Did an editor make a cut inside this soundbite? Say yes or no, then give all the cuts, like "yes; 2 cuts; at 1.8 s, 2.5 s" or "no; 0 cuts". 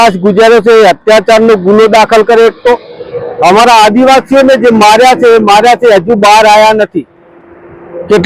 no; 0 cuts